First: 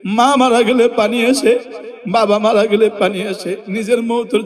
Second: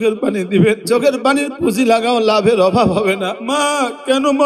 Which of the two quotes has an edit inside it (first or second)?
second